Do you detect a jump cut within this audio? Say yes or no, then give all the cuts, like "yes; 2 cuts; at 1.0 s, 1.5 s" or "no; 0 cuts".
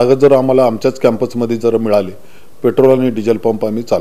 no; 0 cuts